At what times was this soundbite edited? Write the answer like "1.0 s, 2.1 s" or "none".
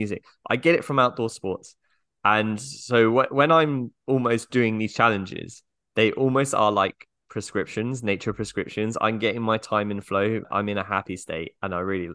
10.5 s